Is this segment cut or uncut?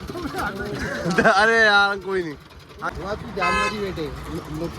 cut